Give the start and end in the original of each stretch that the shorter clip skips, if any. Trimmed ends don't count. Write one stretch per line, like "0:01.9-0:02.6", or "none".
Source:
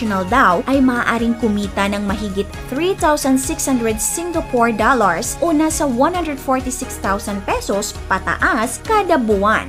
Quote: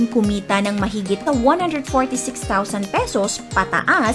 0:02.5-0:05.8